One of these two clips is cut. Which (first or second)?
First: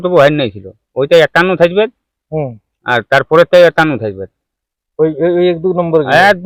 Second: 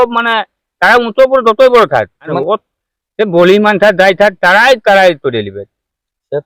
second